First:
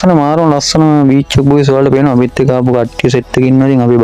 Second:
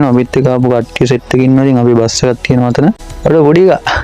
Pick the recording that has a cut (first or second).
second